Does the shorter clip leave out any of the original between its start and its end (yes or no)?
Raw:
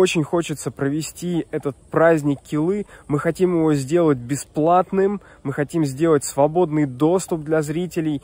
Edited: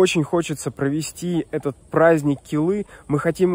no